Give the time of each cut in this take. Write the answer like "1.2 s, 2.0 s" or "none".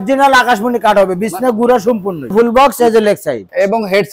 2.3 s